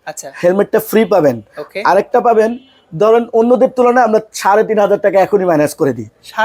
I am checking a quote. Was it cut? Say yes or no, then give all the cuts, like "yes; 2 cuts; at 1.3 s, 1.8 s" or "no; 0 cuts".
no; 0 cuts